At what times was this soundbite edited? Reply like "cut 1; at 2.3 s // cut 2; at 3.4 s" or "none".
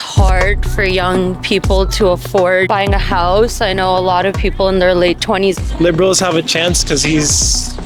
cut 1; at 2.7 s // cut 2; at 5.6 s